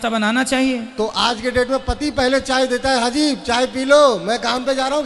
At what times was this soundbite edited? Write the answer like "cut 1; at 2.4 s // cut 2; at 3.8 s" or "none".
none